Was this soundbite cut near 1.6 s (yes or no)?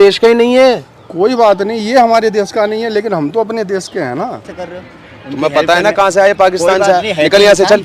no